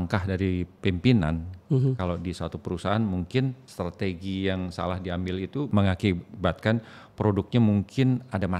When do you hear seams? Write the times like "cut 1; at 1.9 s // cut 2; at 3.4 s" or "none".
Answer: cut 1; at 3.6 s // cut 2; at 5.7 s